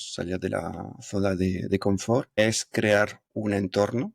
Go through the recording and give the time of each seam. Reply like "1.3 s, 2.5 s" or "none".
2.4 s, 3.2 s